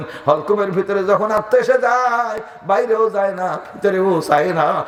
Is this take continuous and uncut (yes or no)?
yes